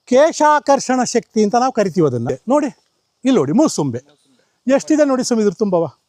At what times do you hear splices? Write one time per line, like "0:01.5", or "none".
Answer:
0:02.3